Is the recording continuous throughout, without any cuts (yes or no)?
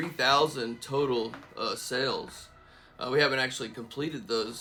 yes